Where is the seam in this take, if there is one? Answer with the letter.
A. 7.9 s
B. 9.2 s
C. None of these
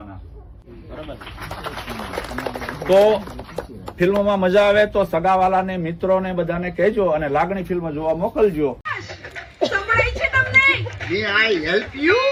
C